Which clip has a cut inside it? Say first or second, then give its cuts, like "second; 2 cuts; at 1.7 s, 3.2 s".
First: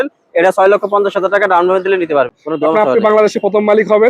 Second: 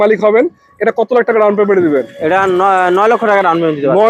first; 1 cut; at 2.3 s